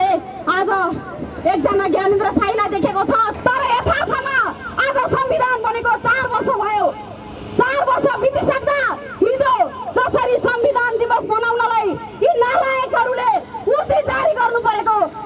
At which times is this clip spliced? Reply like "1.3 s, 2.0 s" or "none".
3.3 s